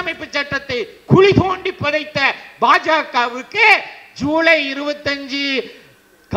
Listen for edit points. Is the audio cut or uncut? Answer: uncut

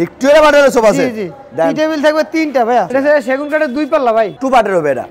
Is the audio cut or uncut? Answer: cut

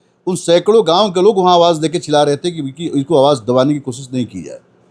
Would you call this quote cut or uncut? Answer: uncut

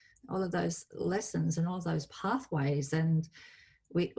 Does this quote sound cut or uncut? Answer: uncut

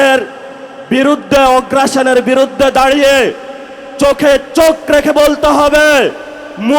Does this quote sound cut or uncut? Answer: uncut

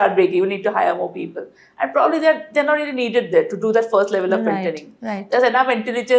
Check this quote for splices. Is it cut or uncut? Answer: uncut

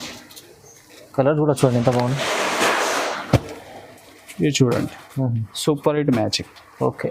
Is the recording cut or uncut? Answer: uncut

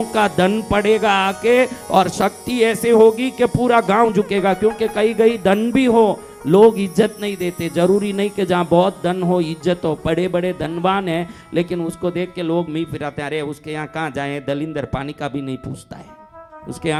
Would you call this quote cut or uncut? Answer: uncut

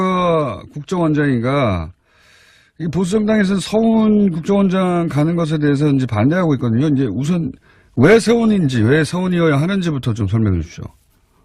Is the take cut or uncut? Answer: cut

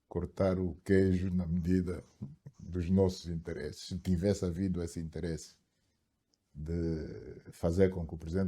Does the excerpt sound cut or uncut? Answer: uncut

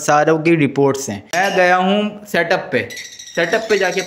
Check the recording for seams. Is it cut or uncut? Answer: cut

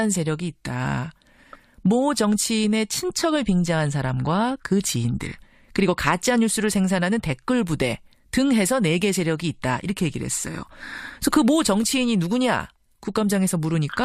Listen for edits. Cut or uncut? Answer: uncut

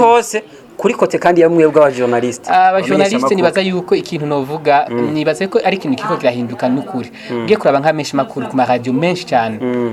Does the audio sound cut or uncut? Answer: uncut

